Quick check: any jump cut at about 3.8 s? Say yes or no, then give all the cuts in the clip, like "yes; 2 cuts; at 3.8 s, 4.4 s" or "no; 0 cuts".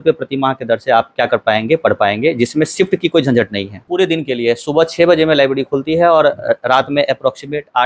yes; 1 cut; at 3.8 s